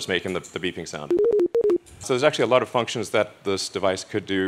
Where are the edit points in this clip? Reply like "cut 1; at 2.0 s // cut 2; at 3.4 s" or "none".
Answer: cut 1; at 1.9 s